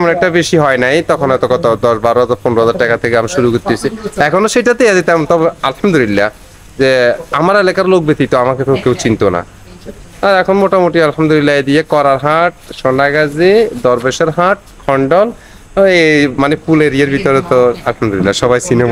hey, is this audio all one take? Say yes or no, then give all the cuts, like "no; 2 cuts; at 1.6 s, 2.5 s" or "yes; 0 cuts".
yes; 0 cuts